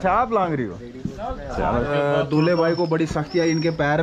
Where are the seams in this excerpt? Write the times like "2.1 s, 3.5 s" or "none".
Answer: 1.9 s

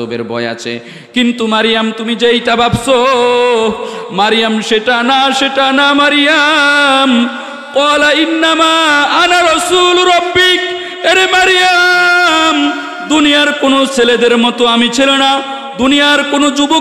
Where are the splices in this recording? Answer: none

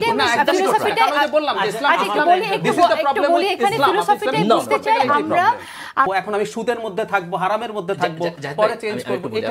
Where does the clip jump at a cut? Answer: 6.1 s

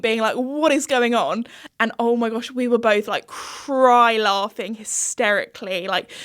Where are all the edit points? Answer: 1.6 s

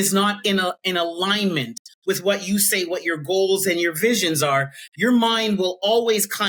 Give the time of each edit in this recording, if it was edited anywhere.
none

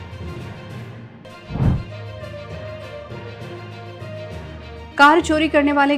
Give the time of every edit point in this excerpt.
1.1 s

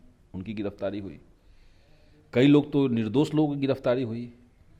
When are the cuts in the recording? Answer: none

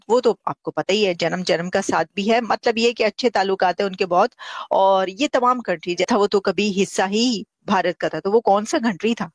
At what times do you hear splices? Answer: 6.1 s

